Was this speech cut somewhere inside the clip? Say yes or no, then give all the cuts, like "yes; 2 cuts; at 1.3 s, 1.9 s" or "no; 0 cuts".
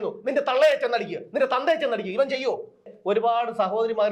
yes; 1 cut; at 2.9 s